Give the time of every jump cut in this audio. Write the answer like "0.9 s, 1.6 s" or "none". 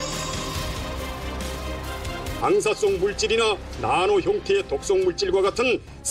2.2 s